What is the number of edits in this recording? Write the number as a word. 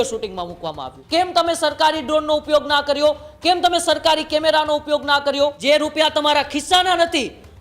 two